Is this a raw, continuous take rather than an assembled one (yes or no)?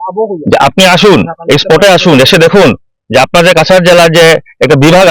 yes